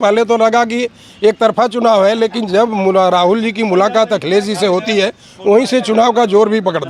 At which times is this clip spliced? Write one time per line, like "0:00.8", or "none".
none